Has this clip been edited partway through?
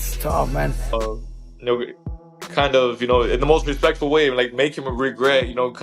yes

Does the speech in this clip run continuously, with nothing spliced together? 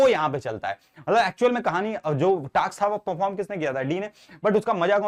yes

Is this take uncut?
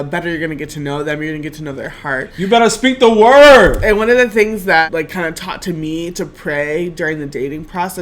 no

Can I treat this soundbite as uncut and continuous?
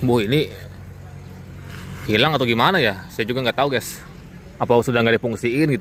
yes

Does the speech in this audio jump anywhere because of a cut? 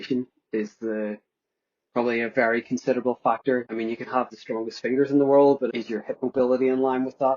yes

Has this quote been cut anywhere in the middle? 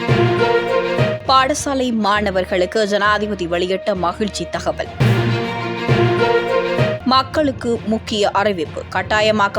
yes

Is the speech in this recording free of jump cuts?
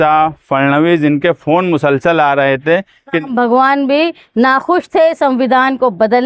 no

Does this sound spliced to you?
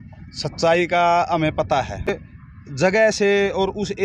yes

